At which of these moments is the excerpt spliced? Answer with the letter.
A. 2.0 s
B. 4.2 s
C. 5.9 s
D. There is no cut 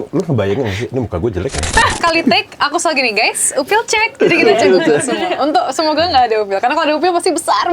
A